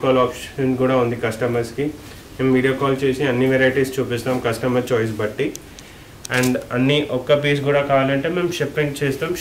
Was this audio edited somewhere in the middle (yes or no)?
no